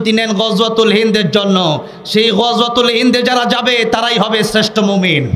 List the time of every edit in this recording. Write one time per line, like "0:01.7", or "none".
none